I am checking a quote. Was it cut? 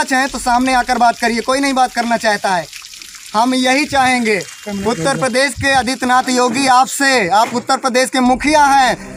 no; 0 cuts

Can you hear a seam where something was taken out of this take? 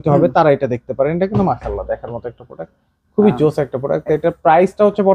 no; 0 cuts

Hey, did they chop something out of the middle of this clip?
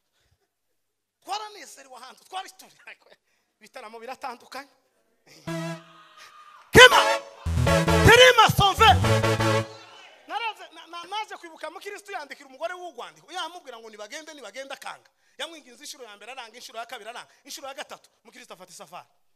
no; 0 cuts

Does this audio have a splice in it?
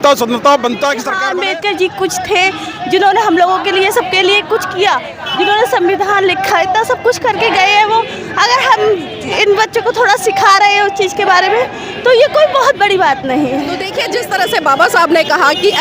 yes; 2 cuts; at 1.1 s, 13.5 s

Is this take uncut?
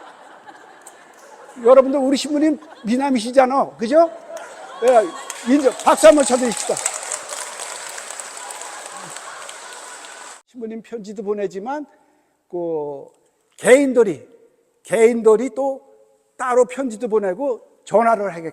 no; 1 cut; at 10.4 s

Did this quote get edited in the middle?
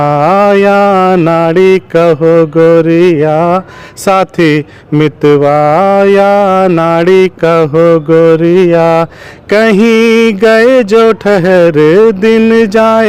no; 0 cuts

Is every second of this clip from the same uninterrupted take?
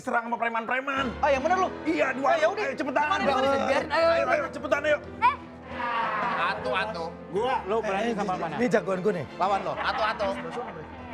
no; 1 cut; at 5.8 s

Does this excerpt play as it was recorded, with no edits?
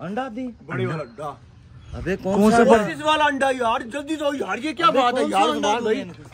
yes; 0 cuts

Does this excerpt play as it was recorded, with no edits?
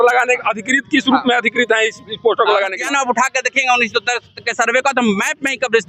no; 1 cut; at 2.8 s

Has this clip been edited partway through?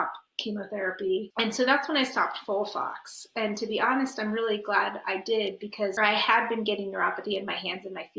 yes; 2 cuts; at 1.3 s, 5.9 s

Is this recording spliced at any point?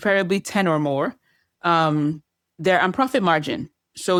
no; 0 cuts

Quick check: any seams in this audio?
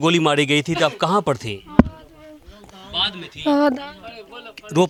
no; 0 cuts

